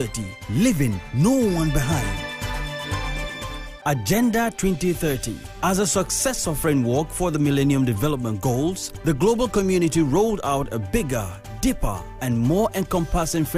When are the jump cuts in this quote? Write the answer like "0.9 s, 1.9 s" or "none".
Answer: 3.7 s